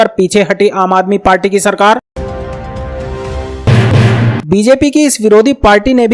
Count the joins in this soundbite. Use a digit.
2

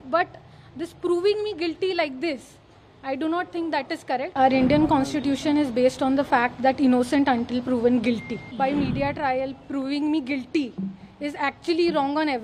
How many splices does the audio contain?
2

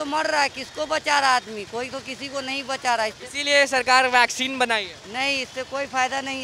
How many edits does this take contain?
0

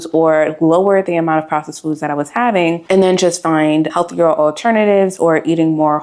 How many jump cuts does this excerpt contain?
2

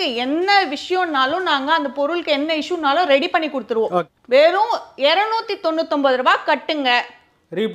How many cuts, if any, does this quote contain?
1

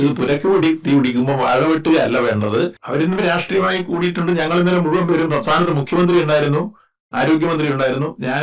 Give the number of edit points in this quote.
1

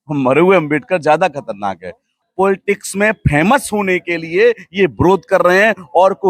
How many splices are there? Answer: 1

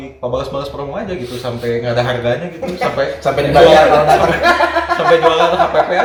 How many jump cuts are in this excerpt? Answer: 0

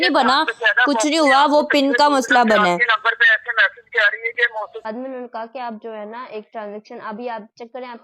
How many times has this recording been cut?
1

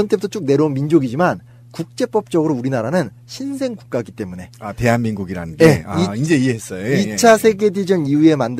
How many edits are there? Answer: 0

